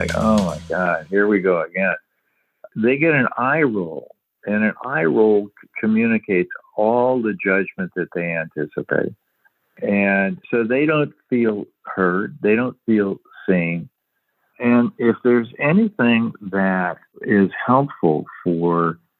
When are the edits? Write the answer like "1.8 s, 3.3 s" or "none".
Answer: 5.6 s, 9.7 s, 14.6 s